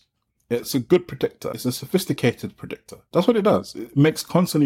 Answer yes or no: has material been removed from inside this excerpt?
no